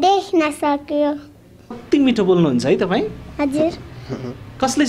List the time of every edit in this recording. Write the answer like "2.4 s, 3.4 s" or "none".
1.8 s